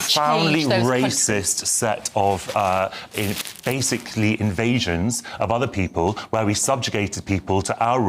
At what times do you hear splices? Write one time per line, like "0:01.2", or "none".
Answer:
none